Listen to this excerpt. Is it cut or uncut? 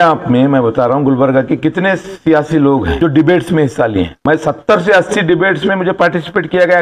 cut